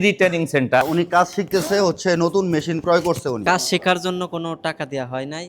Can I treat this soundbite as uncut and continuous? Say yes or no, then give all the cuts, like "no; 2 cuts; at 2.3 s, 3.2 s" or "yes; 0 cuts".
no; 2 cuts; at 0.8 s, 3.4 s